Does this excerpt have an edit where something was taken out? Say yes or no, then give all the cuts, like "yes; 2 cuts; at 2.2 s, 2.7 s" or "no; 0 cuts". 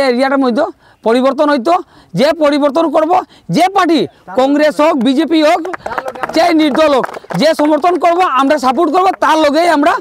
no; 0 cuts